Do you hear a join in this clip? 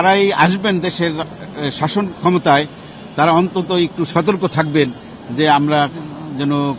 no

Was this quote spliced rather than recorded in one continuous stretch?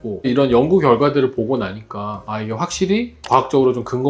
no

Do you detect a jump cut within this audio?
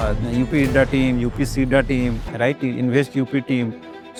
no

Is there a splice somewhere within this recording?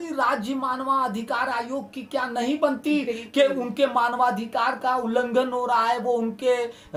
no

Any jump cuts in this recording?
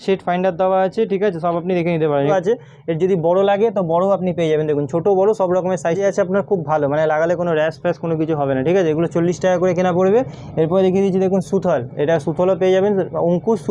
yes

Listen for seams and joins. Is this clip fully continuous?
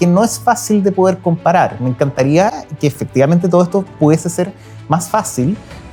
yes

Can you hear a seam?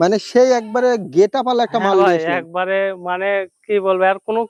no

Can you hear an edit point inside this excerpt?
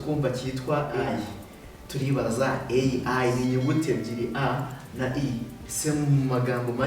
yes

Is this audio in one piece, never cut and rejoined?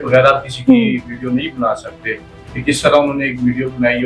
yes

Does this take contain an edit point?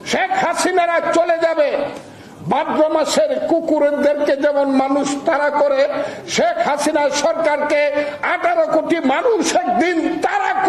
no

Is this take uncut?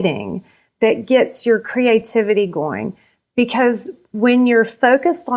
yes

